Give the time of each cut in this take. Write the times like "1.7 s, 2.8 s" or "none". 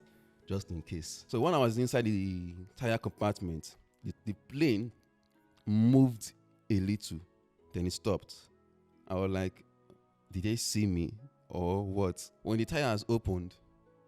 1.1 s, 12.3 s